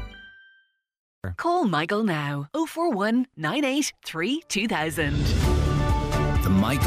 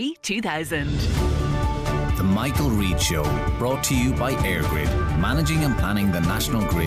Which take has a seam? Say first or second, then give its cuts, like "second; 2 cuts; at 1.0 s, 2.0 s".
first; 1 cut; at 1.1 s